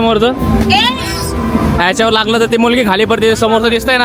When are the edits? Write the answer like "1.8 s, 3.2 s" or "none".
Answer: none